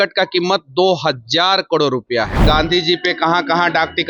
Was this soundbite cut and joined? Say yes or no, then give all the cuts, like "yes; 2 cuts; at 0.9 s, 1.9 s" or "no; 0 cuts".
yes; 1 cut; at 2.4 s